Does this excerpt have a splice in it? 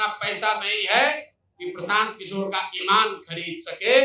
no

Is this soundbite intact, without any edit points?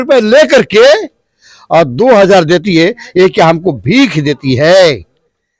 yes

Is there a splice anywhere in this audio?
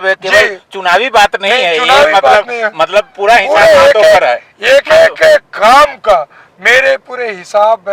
no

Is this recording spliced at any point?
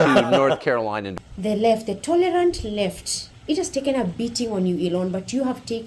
yes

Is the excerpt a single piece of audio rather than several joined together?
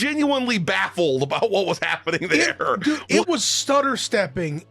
no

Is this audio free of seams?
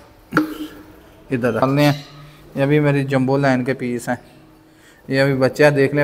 no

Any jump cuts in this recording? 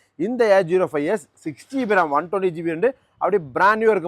no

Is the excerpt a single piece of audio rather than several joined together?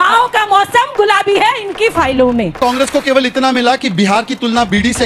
no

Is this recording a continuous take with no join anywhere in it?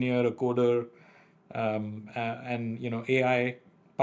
yes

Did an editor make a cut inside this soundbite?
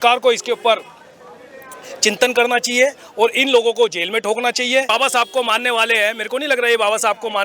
yes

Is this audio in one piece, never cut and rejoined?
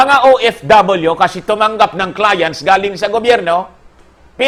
yes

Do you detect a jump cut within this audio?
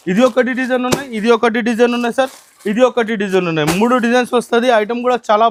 no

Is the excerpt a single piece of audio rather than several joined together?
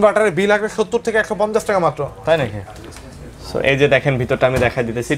yes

